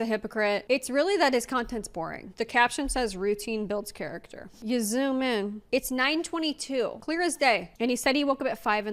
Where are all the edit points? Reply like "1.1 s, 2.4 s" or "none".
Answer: 2.3 s, 4.6 s, 5.6 s, 7.2 s